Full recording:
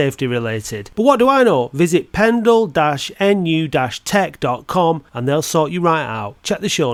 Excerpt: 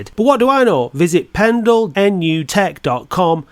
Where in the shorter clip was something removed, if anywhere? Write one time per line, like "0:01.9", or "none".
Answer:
0:02.2